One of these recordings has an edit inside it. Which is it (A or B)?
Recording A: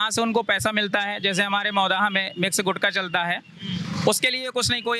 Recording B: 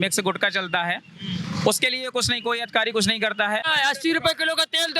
B